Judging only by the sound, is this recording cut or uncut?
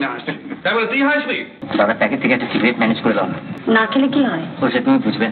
cut